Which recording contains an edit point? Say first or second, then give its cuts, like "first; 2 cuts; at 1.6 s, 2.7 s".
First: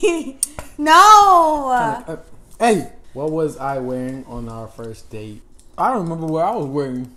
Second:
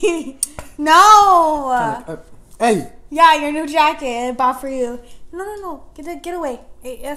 first; 1 cut; at 3.0 s